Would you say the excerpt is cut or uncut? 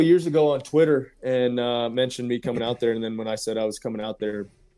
uncut